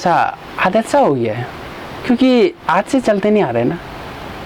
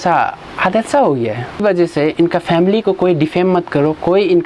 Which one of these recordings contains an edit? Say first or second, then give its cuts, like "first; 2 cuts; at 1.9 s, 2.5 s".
second; 1 cut; at 1.6 s